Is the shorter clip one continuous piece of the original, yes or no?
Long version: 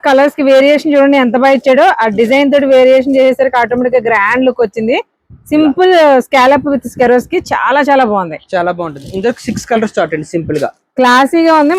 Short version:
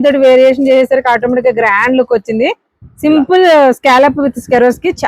yes